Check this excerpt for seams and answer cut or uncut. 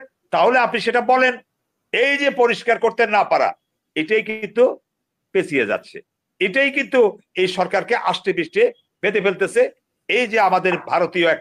uncut